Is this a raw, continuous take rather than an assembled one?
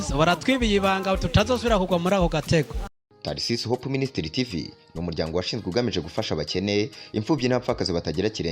no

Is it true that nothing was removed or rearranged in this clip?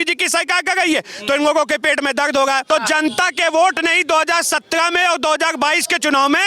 no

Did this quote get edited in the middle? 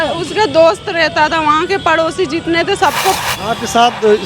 yes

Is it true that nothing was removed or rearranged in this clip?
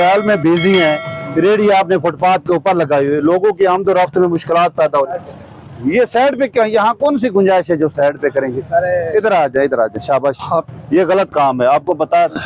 yes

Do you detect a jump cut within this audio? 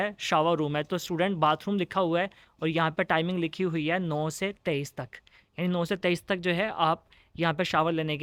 no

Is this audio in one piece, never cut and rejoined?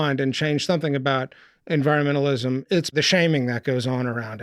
no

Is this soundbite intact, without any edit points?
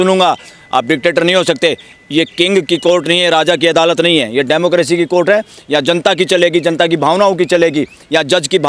yes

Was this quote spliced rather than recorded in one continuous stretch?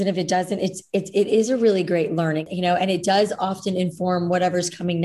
yes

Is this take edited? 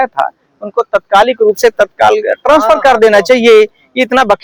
no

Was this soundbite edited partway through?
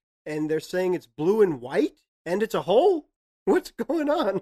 yes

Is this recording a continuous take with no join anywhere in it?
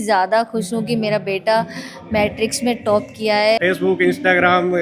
no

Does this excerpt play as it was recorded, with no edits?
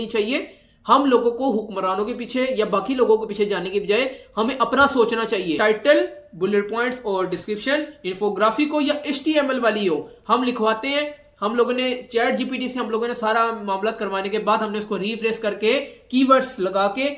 no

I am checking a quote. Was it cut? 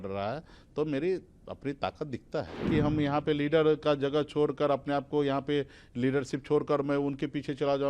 yes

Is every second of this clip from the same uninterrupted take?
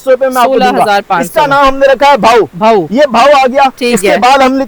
yes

